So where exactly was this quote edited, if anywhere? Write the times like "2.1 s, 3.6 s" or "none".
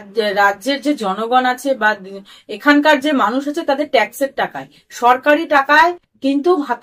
none